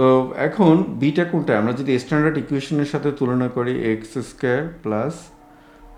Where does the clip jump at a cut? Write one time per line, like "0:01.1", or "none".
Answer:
none